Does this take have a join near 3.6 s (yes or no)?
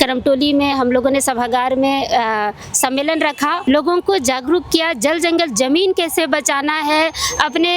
yes